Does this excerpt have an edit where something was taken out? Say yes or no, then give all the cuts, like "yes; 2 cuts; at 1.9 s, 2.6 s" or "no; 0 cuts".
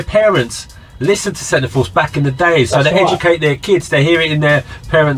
no; 0 cuts